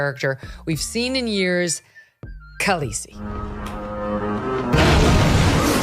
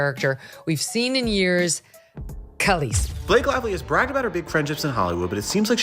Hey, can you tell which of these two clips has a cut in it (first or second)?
second